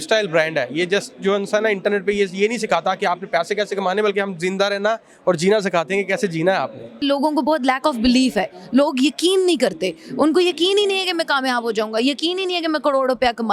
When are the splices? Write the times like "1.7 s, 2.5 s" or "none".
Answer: 7.0 s